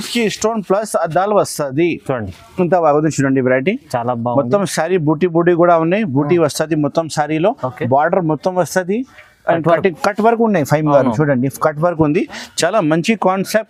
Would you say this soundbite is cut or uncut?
uncut